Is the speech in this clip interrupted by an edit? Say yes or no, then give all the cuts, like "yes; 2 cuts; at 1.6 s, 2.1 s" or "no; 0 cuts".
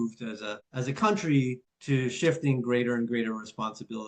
no; 0 cuts